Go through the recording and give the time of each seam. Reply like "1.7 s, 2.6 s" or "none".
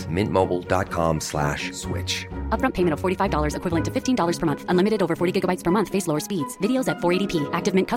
none

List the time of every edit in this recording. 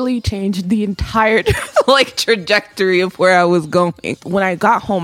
4.1 s

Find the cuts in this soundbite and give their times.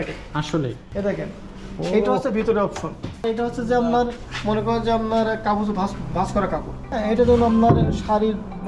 0.8 s, 3.3 s, 6.9 s

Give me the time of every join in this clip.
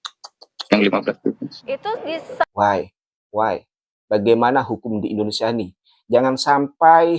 2.4 s

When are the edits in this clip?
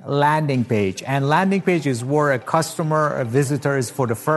none

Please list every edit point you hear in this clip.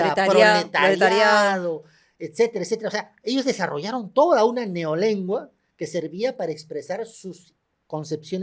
none

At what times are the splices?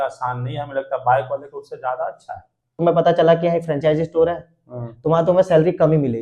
2.7 s

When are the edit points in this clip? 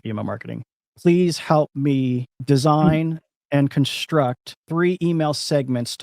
2.3 s, 4.5 s

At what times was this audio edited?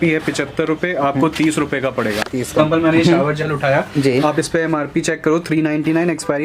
2.6 s

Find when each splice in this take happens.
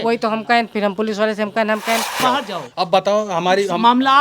2.2 s

